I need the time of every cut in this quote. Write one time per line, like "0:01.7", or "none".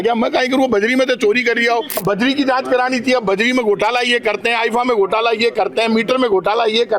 0:02.0